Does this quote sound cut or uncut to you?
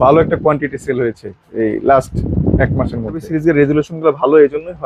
cut